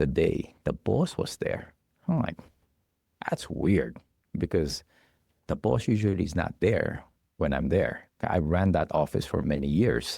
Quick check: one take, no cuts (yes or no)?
yes